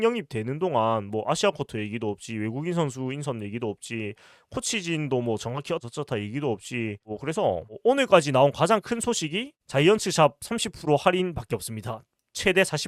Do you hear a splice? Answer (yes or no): no